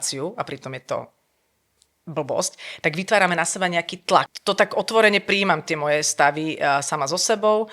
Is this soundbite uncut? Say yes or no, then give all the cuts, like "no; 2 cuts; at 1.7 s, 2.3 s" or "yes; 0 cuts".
no; 1 cut; at 4.3 s